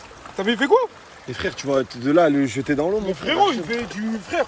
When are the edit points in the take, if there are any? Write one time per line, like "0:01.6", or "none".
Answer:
none